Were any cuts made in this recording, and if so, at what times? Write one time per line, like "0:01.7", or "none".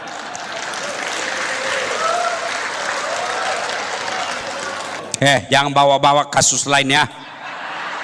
0:05.0